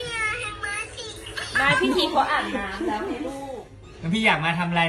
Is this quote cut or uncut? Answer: cut